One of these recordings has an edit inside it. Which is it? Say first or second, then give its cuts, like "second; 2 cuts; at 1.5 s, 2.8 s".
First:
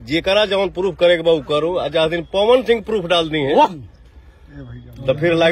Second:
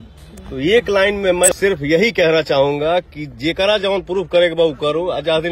second; 1 cut; at 1.5 s